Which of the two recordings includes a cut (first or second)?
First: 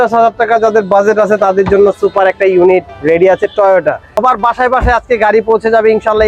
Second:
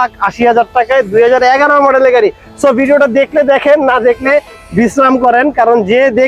first